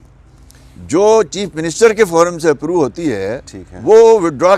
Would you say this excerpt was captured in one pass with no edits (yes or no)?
yes